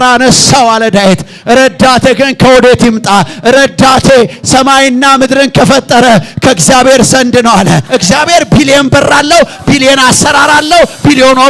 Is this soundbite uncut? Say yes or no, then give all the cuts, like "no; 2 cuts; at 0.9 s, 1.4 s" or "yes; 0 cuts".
no; 1 cut; at 7.8 s